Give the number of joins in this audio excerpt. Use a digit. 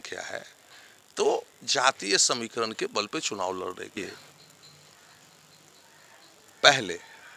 1